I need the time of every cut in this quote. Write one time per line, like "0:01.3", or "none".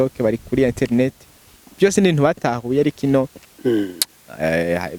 none